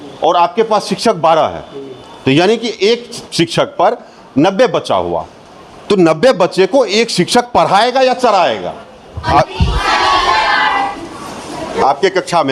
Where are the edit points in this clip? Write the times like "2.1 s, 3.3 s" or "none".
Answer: none